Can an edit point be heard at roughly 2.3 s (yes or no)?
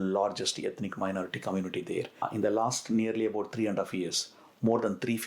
yes